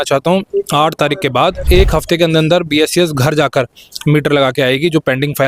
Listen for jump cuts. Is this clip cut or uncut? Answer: cut